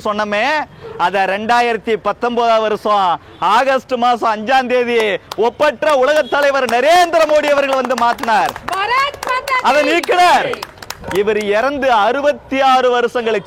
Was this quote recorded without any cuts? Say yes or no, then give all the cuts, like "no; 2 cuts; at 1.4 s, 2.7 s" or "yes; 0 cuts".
yes; 0 cuts